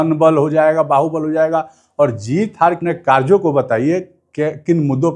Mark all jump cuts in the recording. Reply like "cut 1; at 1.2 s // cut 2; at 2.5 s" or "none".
cut 1; at 2.8 s